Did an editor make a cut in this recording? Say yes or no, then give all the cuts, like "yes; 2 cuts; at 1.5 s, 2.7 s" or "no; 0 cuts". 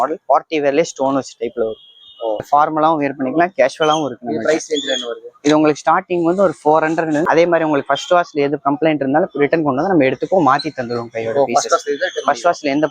yes; 2 cuts; at 2.5 s, 7.2 s